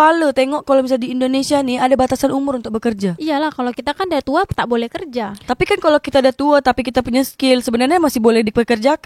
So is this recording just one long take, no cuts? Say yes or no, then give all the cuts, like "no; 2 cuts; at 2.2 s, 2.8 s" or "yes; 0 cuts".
yes; 0 cuts